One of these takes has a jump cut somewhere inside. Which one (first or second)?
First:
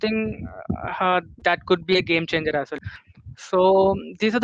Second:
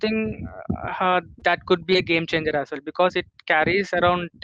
first